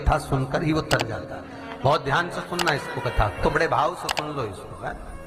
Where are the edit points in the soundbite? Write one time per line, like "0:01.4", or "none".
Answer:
none